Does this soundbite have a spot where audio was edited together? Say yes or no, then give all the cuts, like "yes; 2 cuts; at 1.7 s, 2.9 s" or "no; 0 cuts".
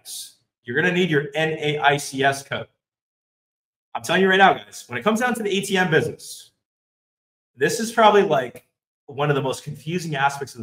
no; 0 cuts